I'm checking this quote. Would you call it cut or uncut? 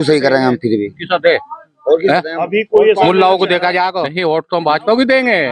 cut